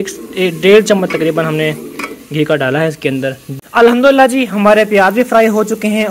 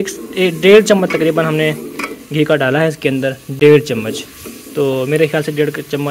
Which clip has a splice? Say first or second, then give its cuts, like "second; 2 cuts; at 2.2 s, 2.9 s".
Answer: first; 1 cut; at 3.4 s